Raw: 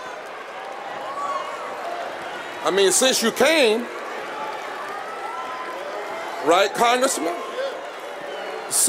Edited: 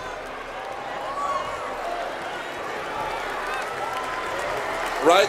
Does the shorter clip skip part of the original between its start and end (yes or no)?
yes